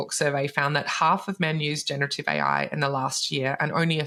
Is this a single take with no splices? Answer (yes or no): yes